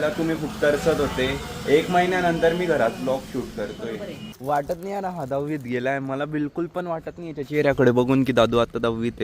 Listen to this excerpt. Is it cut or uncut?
cut